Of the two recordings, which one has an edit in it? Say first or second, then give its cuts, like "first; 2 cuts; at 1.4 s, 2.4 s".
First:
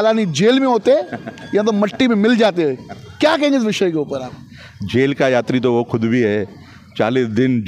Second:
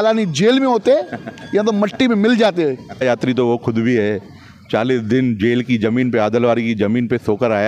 second; 1 cut; at 3.0 s